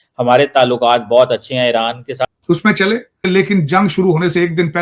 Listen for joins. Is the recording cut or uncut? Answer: cut